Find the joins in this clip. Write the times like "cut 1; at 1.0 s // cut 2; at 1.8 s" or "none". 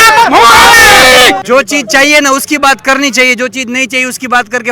cut 1; at 1.4 s